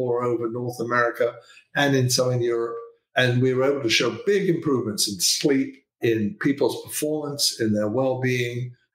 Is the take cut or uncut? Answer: cut